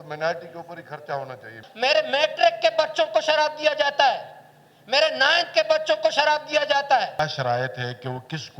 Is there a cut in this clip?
yes; 2 cuts; at 1.6 s, 7.2 s

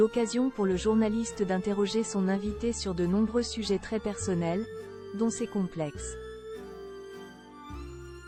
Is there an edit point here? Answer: no; 0 cuts

